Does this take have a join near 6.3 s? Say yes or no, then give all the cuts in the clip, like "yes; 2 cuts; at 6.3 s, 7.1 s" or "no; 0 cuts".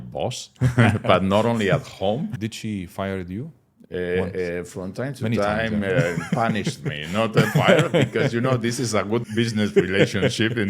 no; 2 cuts; at 2.4 s, 9.3 s